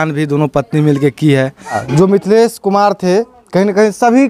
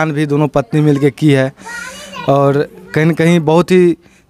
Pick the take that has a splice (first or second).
first